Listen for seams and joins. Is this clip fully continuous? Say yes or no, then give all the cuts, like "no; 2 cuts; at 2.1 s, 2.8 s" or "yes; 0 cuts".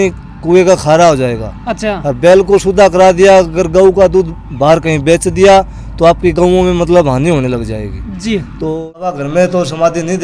no; 1 cut; at 8.7 s